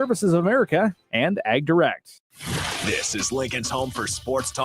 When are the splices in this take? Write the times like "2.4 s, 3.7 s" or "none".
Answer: 2.1 s